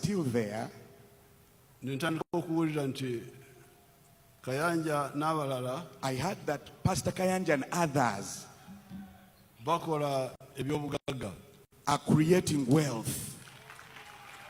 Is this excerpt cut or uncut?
uncut